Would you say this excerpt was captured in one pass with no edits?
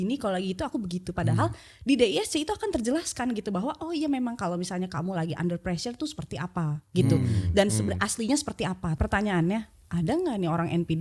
no; 1 cut; at 8.9 s

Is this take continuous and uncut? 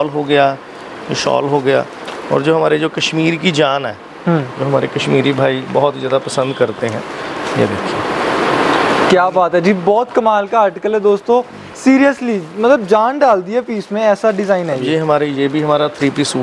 yes; 0 cuts

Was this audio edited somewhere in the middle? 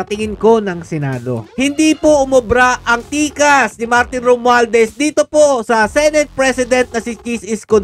yes; 1 cut; at 1.5 s

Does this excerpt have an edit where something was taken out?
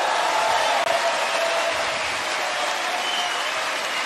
no; 0 cuts

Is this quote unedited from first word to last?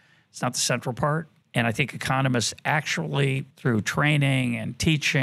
no; 2 cuts; at 1.3 s, 3.5 s

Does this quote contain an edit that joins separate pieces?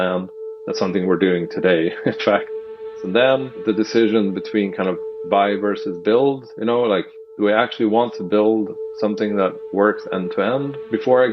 yes; 2 cuts; at 2.6 s, 3.6 s

